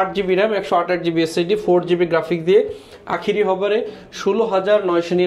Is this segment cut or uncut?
uncut